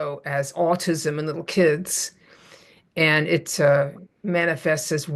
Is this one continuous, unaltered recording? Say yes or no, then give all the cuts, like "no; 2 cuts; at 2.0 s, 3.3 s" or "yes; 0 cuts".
yes; 0 cuts